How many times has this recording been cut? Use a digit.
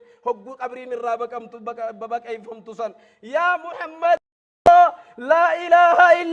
1